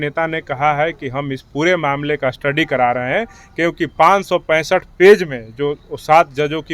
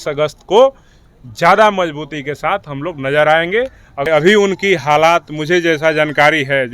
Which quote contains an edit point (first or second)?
second